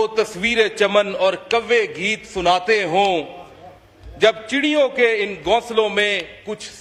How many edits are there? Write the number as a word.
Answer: zero